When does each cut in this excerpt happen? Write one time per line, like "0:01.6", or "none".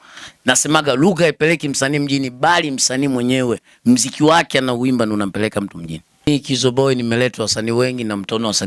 0:06.3